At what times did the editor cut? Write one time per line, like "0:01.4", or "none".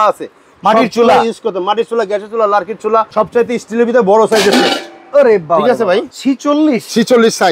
0:03.1
0:06.1